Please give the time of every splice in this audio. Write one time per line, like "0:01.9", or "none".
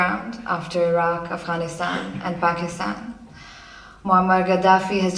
none